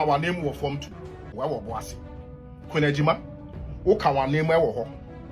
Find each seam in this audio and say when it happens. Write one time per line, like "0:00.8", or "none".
0:01.3